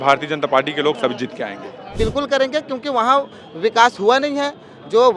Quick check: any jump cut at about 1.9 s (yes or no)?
yes